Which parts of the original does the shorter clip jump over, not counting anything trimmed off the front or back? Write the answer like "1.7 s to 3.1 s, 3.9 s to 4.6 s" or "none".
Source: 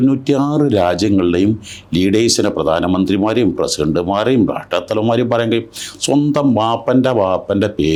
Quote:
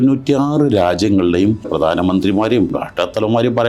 1.7 s to 2.5 s, 3.6 s to 4.5 s